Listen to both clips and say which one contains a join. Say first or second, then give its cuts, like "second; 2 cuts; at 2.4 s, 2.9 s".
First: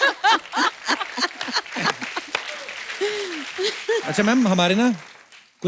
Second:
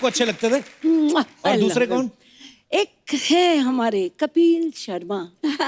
first; 1 cut; at 4.0 s